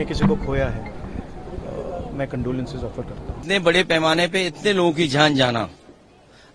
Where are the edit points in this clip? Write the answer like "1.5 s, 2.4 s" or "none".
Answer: 3.4 s